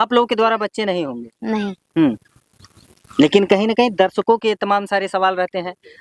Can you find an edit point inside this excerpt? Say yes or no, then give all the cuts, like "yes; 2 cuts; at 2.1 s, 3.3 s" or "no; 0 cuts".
no; 0 cuts